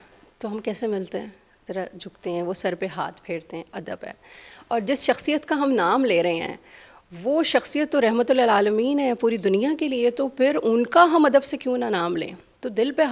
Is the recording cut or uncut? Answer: uncut